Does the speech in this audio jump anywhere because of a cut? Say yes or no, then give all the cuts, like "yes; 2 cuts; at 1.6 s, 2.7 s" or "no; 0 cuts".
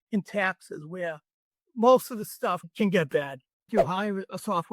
yes; 1 cut; at 3.7 s